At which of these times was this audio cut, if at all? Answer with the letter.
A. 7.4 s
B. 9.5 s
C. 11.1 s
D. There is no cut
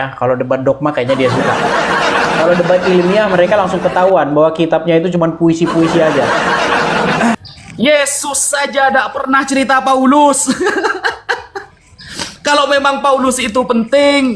A